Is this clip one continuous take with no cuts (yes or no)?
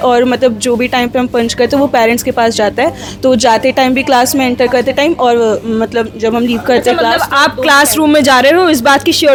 yes